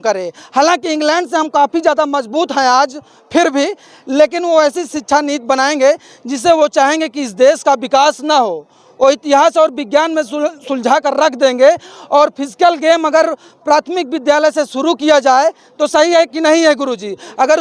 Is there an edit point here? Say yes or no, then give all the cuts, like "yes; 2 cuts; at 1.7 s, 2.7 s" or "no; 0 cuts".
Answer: no; 0 cuts